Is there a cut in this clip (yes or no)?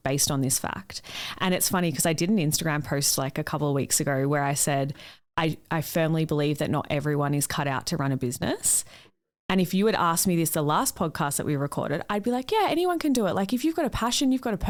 no